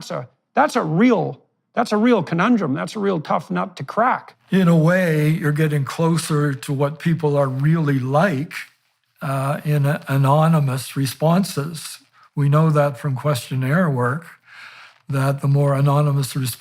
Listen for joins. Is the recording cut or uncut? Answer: cut